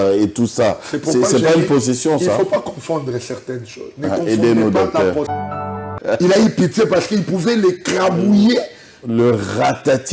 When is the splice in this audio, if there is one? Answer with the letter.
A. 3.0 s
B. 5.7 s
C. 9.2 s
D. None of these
B